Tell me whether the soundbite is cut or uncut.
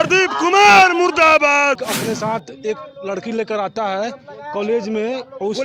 cut